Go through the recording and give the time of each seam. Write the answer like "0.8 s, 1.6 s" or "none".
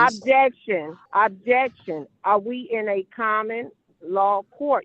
1.0 s